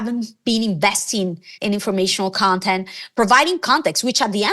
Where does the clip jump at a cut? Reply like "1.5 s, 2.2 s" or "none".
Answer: 1.5 s